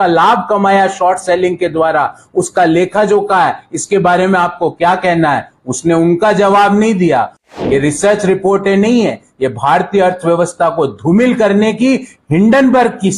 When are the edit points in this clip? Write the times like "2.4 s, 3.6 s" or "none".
7.4 s